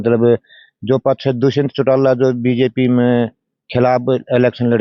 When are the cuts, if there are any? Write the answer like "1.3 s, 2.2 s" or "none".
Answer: none